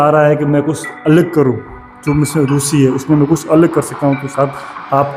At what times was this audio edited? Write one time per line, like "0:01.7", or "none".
none